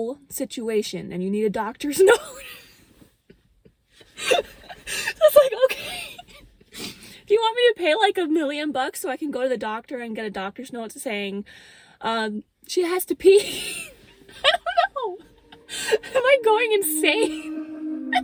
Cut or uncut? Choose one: uncut